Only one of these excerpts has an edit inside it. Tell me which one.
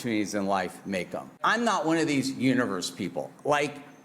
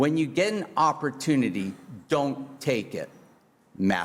first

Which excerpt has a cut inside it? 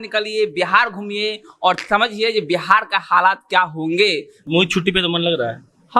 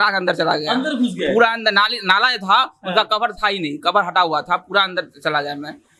first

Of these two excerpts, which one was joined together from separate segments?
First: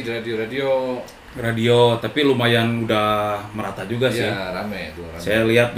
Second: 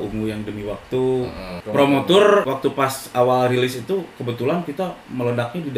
second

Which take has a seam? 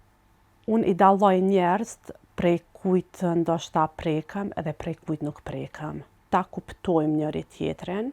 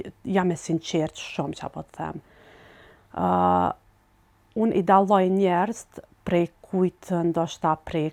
first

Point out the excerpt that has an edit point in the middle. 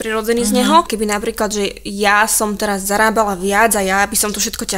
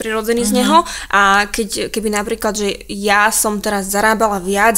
first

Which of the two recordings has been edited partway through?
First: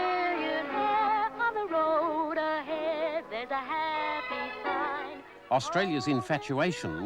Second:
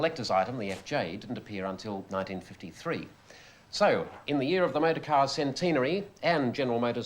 second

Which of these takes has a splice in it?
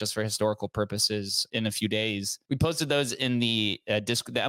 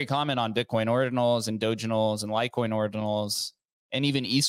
first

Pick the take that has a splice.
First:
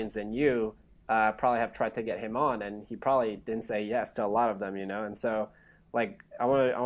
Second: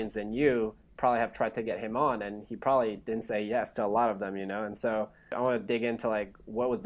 second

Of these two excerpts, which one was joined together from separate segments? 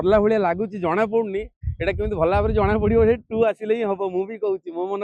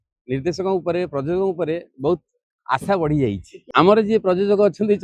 second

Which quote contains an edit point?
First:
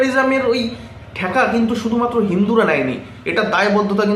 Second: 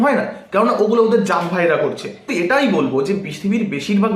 second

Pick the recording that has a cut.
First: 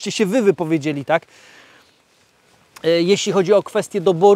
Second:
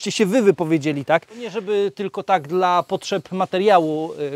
second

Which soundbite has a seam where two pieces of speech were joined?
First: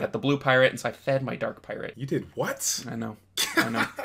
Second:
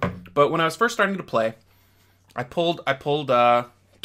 first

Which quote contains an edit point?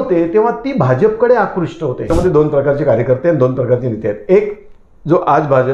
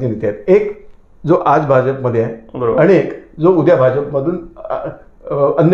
first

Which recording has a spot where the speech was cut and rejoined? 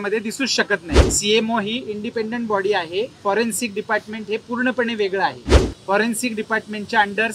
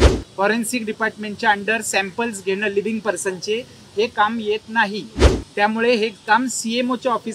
first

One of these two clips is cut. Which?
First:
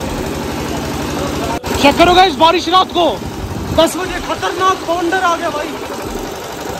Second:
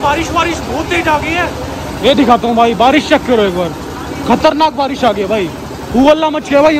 first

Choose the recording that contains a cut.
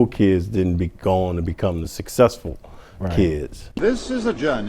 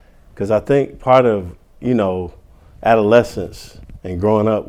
first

